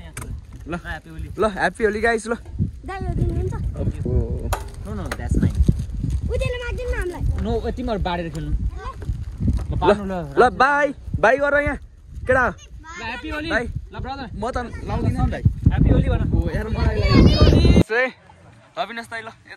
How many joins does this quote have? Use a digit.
1